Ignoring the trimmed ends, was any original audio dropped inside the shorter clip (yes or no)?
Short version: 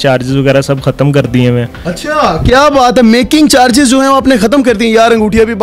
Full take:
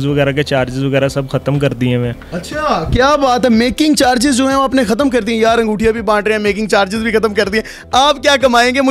no